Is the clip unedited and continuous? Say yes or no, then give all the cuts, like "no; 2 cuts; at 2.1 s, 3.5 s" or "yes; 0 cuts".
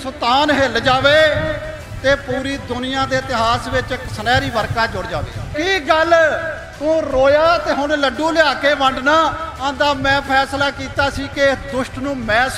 no; 1 cut; at 5.5 s